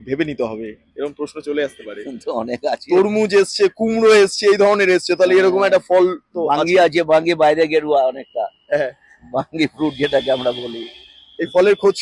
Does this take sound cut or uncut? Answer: uncut